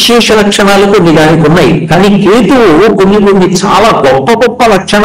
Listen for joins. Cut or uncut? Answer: uncut